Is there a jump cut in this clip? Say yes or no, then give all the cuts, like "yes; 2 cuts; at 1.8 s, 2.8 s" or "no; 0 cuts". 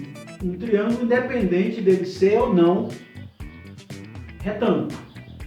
yes; 2 cuts; at 3.1 s, 4.4 s